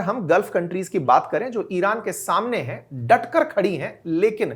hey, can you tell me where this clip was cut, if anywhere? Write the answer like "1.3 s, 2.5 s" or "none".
none